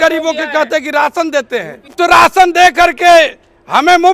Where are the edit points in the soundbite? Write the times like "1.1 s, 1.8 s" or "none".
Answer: 1.9 s